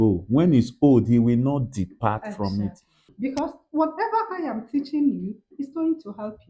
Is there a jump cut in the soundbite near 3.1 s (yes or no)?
yes